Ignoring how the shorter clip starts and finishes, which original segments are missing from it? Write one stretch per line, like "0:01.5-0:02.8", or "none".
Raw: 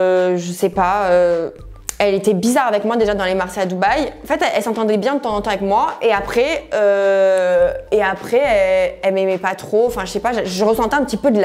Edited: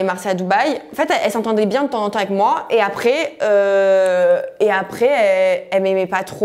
none